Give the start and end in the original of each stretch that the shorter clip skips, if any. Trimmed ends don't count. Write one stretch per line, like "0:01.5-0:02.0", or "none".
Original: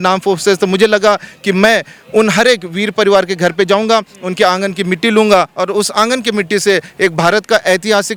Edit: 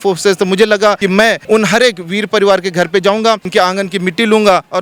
0:01.4-0:01.8
0:04.1-0:04.3